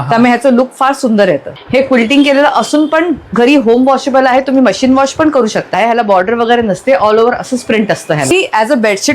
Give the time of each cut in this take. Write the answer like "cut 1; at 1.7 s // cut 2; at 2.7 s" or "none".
cut 1; at 1.5 s // cut 2; at 5.7 s // cut 3; at 8.3 s